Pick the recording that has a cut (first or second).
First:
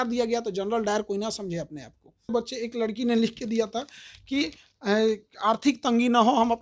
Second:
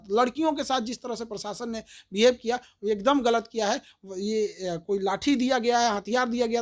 first